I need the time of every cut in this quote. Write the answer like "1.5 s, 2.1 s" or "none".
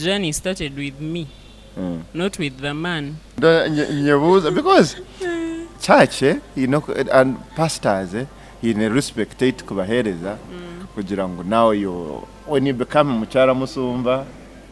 3.4 s